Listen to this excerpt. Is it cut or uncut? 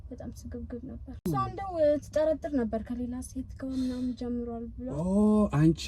cut